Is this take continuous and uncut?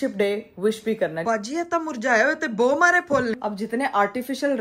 no; 2 cuts; at 1.2 s, 3.4 s

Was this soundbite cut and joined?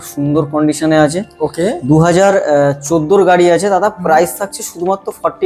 no; 0 cuts

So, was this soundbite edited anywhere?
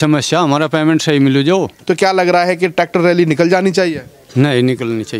yes; 1 cut; at 1.7 s

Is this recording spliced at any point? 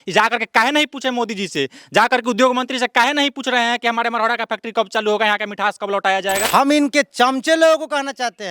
yes; 1 cut; at 6.4 s

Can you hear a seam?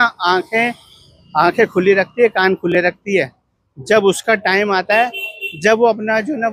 no; 0 cuts

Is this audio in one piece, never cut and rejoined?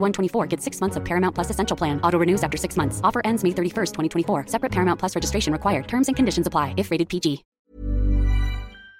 no; 1 cut; at 7.5 s

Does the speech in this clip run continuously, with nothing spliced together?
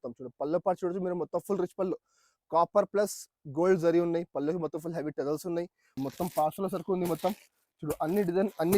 no; 1 cut; at 6.0 s

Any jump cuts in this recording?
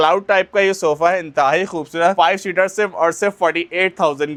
no; 0 cuts

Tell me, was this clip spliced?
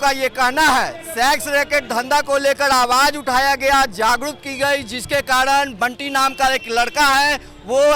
no; 0 cuts

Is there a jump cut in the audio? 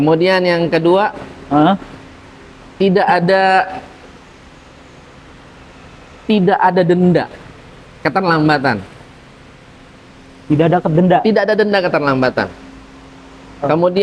no; 0 cuts

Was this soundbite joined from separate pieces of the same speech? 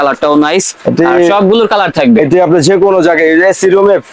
no; 0 cuts

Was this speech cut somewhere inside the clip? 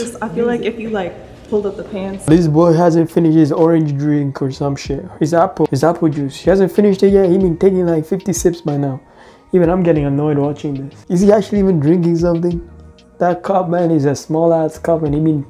no; 0 cuts

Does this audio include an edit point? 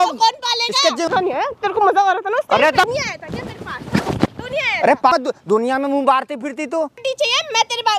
yes; 4 cuts; at 1.1 s, 2.9 s, 5.1 s, 7.0 s

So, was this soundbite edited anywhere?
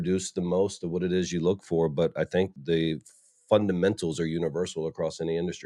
yes; 1 cut; at 2.5 s

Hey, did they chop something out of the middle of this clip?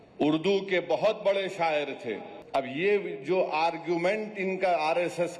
yes; 1 cut; at 2.3 s

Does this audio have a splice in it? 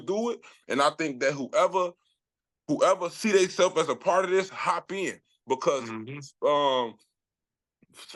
no; 0 cuts

